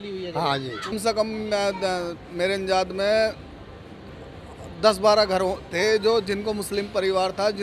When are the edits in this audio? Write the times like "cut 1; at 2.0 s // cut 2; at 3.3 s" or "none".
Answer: cut 1; at 1.0 s